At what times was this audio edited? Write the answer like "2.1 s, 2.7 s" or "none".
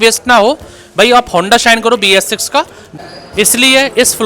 2.8 s